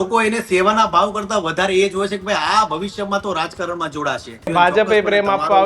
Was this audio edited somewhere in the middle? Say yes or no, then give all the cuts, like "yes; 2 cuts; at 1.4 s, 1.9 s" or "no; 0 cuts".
yes; 1 cut; at 4.5 s